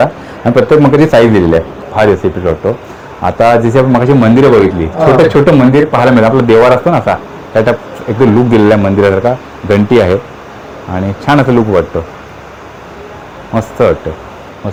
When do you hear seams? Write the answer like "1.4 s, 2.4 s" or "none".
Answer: none